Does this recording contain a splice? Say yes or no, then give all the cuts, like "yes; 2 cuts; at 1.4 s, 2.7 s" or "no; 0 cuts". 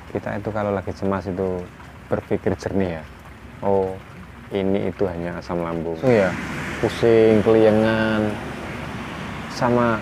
yes; 1 cut; at 6.0 s